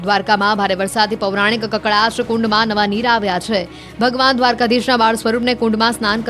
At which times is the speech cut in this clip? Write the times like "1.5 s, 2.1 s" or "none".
1.6 s